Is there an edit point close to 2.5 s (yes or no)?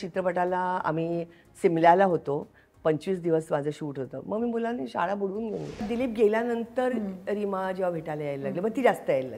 no